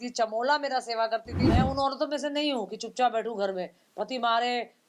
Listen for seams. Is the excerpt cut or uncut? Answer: cut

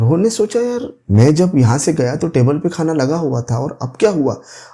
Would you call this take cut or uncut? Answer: uncut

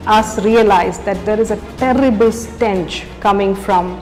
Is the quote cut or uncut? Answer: uncut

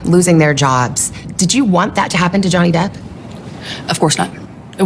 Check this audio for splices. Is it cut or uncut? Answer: uncut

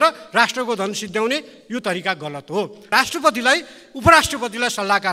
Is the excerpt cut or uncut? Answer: cut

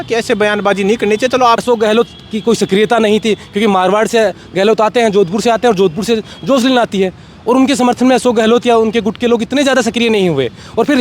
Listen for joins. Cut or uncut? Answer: cut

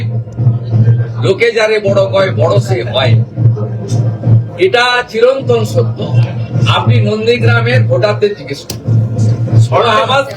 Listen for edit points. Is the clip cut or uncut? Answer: uncut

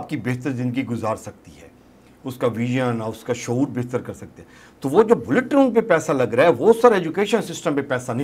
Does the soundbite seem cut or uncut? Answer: uncut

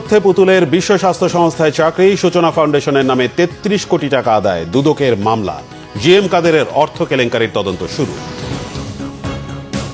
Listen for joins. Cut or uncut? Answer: cut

